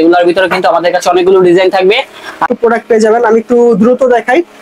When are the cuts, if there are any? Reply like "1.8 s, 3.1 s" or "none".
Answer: 2.4 s